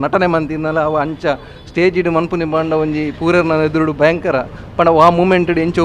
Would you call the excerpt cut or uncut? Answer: uncut